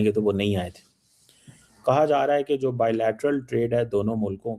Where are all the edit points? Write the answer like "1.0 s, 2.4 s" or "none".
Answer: none